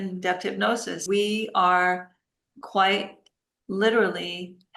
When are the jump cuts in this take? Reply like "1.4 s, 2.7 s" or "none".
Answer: 1.0 s